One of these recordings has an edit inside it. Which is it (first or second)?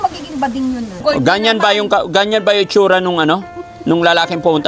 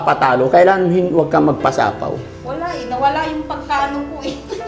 first